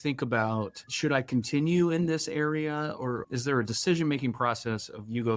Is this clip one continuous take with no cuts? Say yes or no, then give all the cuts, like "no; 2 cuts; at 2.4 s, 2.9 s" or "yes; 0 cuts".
yes; 0 cuts